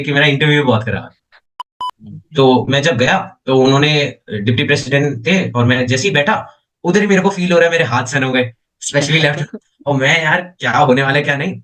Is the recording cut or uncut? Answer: cut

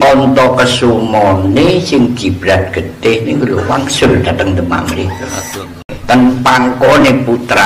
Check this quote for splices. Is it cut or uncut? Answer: cut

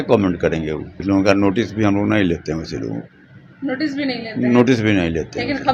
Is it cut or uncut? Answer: cut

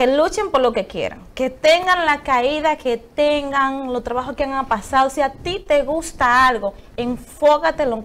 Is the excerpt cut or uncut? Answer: uncut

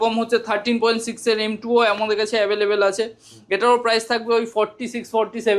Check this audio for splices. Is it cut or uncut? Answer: uncut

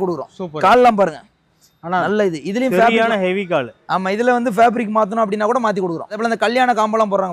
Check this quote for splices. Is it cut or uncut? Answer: cut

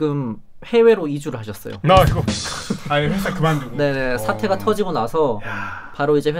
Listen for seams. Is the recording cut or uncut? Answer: uncut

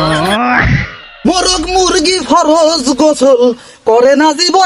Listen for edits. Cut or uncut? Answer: cut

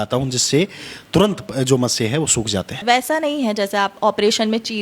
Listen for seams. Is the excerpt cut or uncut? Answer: cut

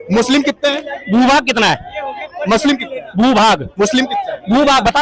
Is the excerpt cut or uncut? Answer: uncut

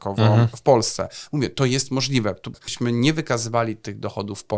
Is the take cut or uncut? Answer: cut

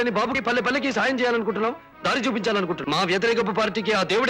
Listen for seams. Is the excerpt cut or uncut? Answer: cut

